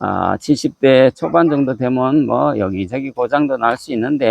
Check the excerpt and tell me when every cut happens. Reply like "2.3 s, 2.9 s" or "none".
none